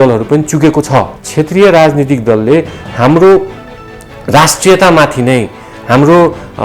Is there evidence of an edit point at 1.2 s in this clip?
yes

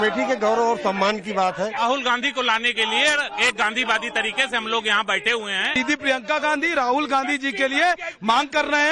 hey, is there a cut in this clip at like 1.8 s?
yes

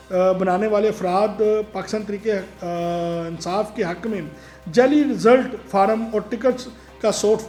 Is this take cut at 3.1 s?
no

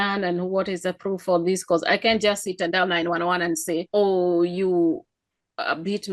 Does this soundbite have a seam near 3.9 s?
yes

